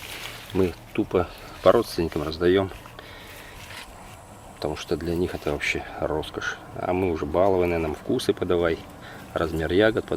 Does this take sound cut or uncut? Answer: uncut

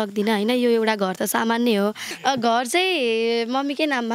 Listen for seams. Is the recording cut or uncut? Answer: cut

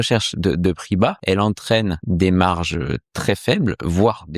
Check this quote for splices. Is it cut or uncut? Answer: cut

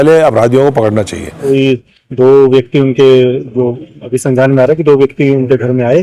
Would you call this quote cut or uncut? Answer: cut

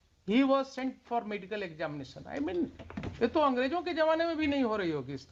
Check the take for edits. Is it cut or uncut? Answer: uncut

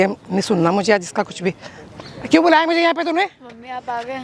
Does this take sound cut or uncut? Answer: uncut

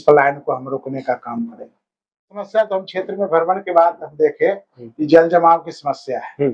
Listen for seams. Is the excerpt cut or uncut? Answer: cut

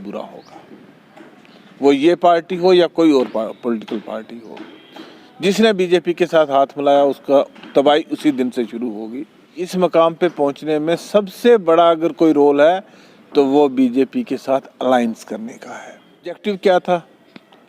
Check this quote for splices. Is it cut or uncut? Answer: cut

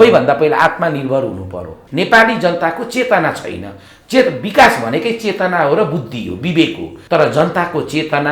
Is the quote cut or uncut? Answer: cut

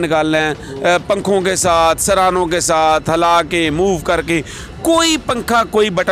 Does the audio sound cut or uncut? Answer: uncut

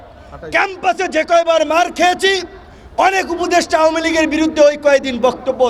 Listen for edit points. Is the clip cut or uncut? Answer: uncut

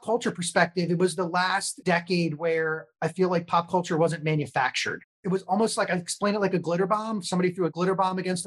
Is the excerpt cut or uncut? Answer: cut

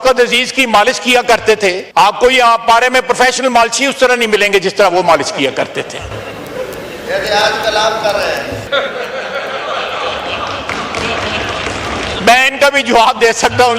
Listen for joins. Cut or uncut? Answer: cut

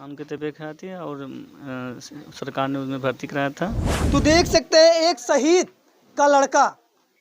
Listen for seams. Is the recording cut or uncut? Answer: cut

